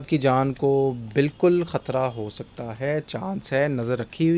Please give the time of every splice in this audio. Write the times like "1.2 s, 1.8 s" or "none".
none

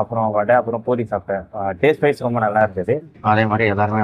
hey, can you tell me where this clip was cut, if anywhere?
3.1 s

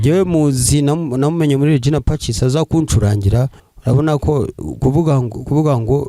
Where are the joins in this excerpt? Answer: 3.6 s

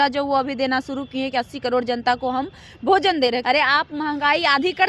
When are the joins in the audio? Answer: 3.4 s

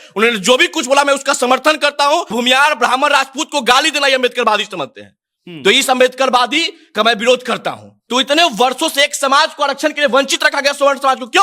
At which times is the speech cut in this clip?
2.3 s, 7.9 s

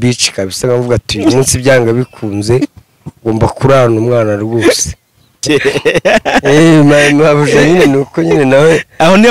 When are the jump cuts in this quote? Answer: 5.4 s

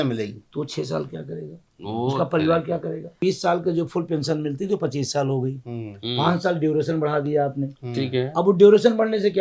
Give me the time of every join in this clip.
3.2 s

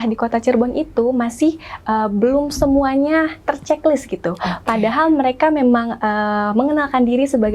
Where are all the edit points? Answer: none

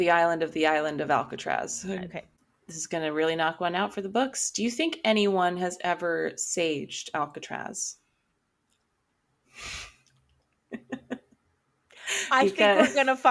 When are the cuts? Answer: 2.4 s

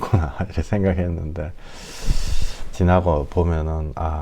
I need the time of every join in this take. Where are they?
none

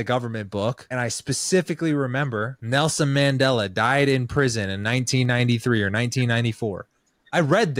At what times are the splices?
0.8 s, 2.5 s

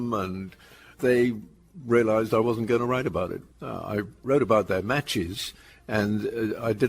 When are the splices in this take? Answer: 4.0 s

